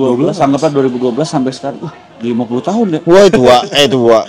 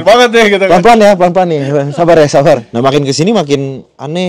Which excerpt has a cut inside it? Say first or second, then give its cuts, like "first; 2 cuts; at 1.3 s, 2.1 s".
second; 1 cut; at 2.7 s